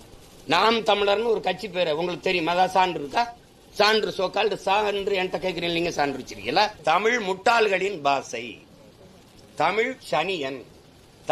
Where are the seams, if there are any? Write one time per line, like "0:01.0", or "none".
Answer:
0:06.8

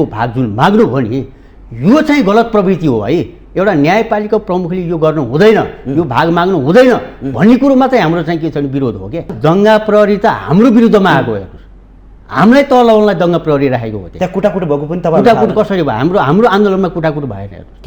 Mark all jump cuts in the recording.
0:09.3

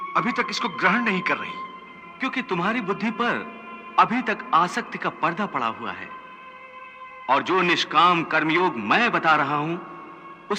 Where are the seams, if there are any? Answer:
none

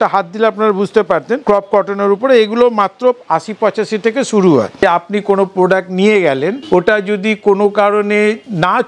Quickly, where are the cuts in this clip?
0:01.4
0:04.8
0:06.6

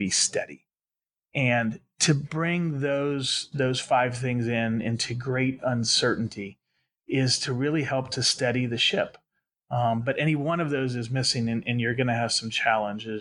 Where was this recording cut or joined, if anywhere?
none

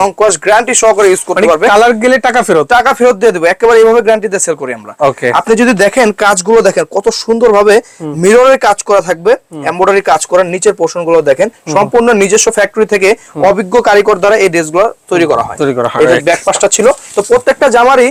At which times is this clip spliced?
none

